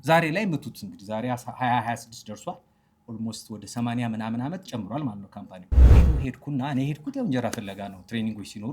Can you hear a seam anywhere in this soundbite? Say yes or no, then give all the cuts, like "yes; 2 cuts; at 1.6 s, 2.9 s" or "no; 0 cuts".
yes; 1 cut; at 6.0 s